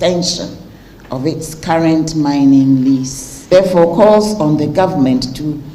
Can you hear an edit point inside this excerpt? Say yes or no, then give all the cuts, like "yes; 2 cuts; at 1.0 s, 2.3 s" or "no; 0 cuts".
yes; 1 cut; at 3.5 s